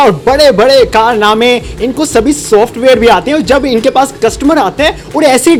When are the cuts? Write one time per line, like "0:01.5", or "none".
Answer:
none